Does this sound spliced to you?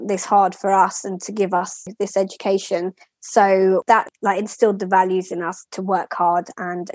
yes; 2 cuts; at 1.9 s, 3.9 s

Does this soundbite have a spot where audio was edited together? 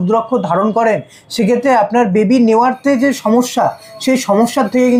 no; 0 cuts

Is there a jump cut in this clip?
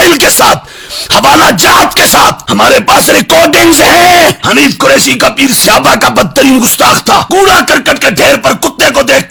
no; 0 cuts

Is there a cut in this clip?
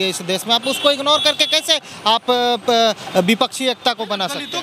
no; 0 cuts

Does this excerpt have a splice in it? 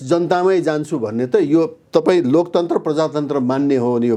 no; 0 cuts

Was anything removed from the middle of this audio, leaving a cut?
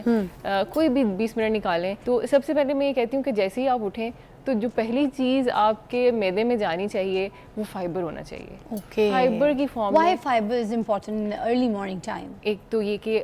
yes; 1 cut; at 2.0 s

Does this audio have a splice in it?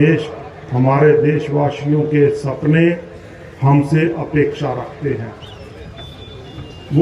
no; 0 cuts

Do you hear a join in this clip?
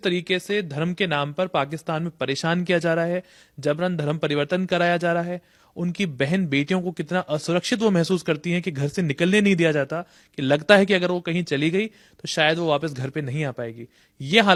no; 0 cuts

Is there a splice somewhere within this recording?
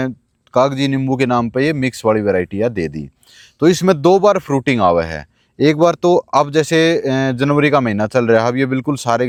no; 0 cuts

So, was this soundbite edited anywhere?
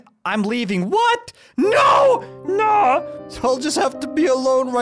no; 0 cuts

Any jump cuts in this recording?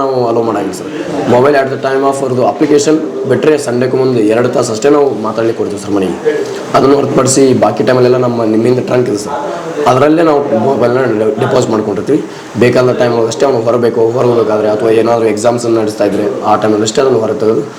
no; 0 cuts

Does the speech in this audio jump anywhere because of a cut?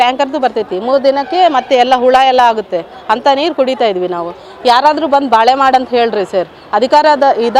no; 0 cuts

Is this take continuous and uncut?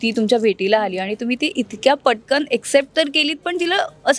yes; 0 cuts

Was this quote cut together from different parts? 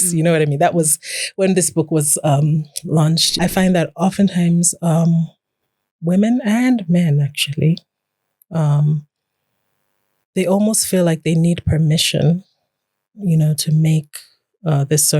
yes; 1 cut; at 3.3 s

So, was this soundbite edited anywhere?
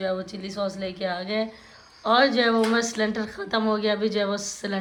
no; 0 cuts

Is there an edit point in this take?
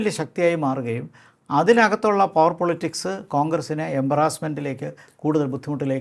no; 0 cuts

